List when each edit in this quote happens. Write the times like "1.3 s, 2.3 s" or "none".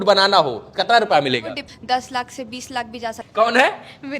1.6 s, 3.2 s